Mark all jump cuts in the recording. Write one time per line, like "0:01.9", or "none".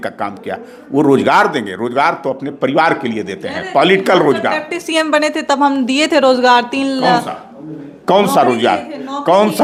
none